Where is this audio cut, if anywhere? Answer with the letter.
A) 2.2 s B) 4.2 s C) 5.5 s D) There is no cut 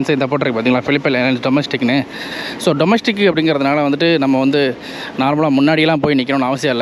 D